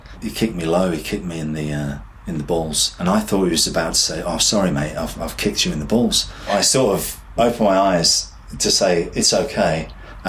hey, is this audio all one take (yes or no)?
no